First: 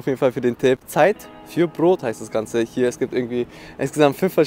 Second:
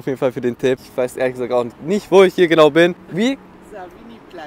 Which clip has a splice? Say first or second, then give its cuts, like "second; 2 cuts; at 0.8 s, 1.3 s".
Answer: second; 2 cuts; at 0.9 s, 3.0 s